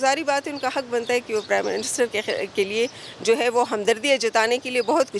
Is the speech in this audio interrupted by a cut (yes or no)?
no